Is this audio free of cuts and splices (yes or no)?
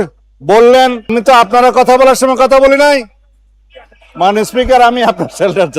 no